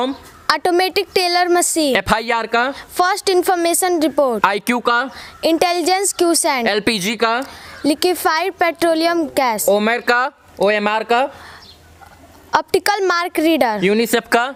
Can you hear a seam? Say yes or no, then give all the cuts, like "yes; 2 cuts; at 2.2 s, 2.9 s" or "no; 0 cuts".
no; 0 cuts